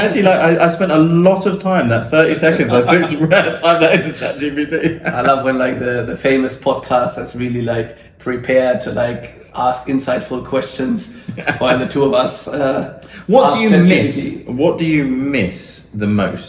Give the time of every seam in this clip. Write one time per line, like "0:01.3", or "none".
none